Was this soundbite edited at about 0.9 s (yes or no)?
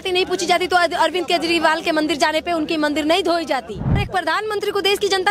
no